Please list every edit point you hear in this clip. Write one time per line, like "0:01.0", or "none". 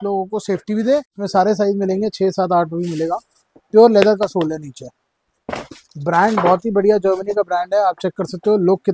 0:01.2